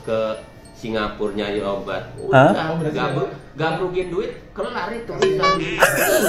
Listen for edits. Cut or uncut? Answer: uncut